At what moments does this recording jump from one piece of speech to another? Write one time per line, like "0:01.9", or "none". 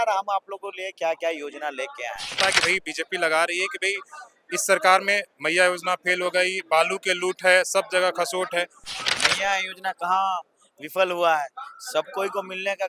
0:02.3
0:08.9

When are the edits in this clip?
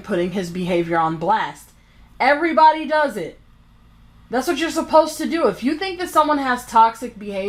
none

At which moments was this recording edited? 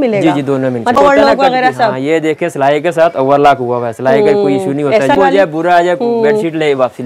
0:01.0
0:05.1

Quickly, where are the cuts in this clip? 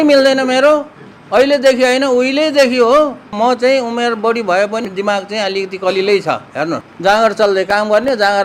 0:03.2
0:04.8
0:06.9

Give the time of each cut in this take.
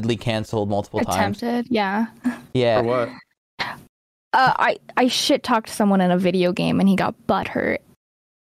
none

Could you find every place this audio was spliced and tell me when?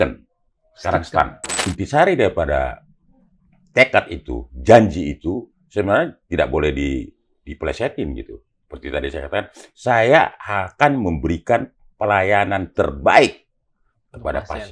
0:01.5

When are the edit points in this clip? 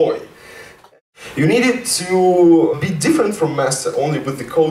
0:00.8
0:02.7

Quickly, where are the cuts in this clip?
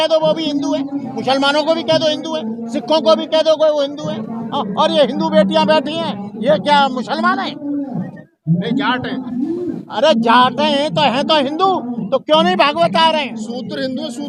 none

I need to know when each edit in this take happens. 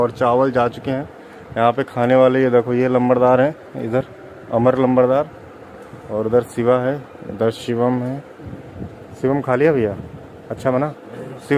none

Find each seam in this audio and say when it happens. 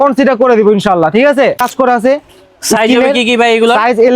0:01.6

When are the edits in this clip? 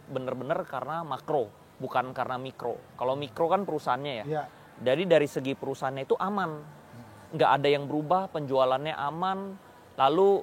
none

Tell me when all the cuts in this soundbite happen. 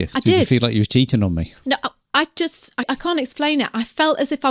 0:02.9

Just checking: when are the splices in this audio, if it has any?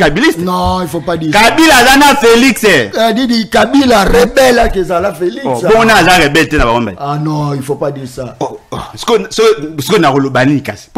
none

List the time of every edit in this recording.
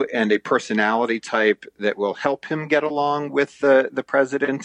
none

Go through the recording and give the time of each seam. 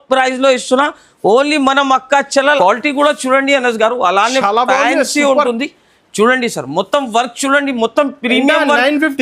0:02.6

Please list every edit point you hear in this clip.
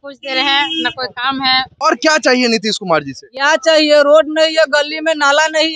0:01.7

